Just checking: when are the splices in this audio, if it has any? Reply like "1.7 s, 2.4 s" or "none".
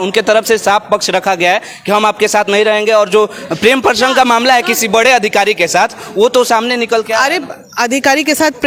none